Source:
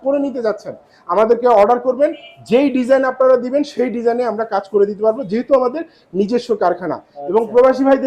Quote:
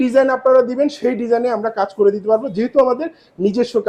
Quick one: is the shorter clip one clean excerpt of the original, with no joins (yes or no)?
yes